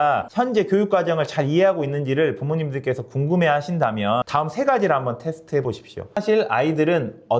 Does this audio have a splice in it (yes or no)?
yes